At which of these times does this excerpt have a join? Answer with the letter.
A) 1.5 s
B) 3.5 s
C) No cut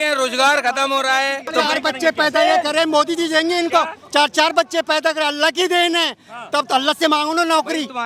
A